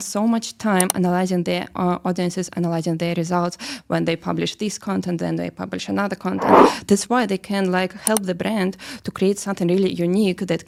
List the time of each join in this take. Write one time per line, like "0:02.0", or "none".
none